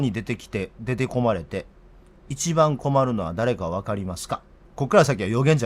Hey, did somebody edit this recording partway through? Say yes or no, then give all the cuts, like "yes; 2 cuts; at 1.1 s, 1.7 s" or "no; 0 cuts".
yes; 1 cut; at 4.6 s